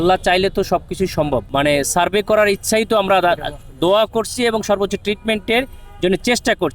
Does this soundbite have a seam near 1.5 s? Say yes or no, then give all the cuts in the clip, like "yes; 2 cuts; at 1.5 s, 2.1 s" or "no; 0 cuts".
yes; 1 cut; at 1.5 s